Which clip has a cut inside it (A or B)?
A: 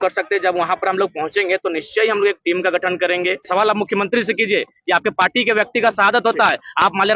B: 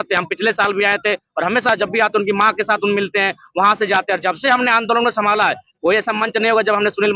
A